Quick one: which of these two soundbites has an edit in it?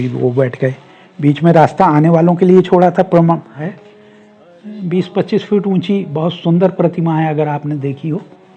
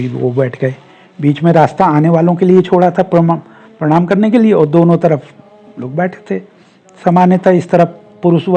first; 1 cut; at 3.6 s

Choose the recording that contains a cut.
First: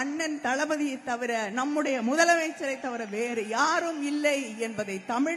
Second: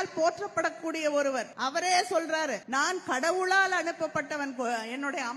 second; 2 cuts; at 1.5 s, 2.6 s

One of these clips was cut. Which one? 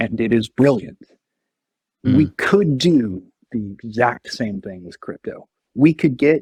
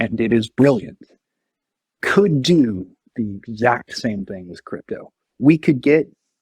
second; 1 cut; at 2.0 s

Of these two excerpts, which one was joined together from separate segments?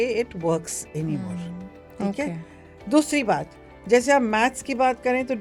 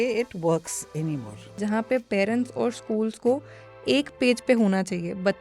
second; 1 cut; at 1.6 s

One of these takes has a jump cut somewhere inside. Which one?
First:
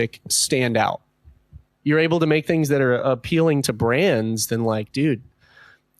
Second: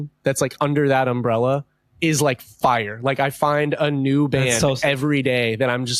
first; 1 cut; at 1.7 s

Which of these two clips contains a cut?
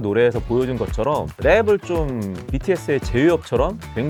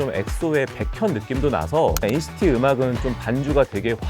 second; 1 cut; at 2.0 s

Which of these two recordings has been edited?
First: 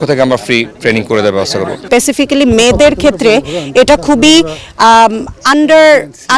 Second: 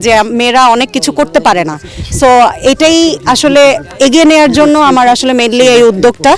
first; 1 cut; at 1.8 s

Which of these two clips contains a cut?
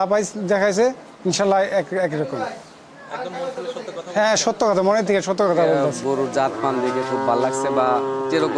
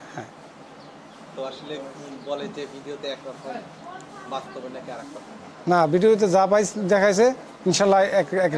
first; 1 cut; at 6.0 s

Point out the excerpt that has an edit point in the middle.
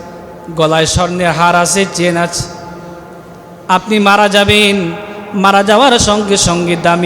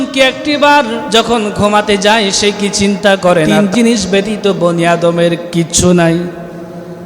second; 2 cuts; at 1.0 s, 3.5 s

